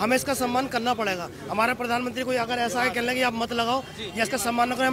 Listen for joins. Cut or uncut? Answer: uncut